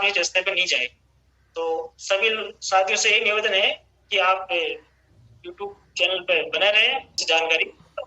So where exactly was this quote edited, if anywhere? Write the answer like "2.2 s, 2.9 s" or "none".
7.2 s